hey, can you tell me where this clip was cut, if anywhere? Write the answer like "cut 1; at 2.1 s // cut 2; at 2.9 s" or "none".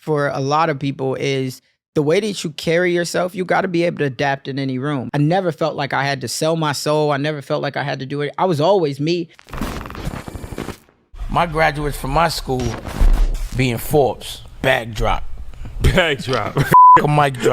cut 1; at 5.1 s // cut 2; at 9.3 s